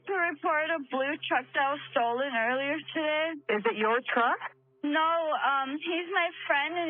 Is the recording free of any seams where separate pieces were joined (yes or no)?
no